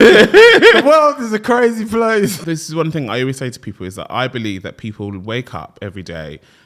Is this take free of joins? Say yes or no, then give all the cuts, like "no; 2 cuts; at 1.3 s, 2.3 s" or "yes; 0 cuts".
no; 1 cut; at 2.4 s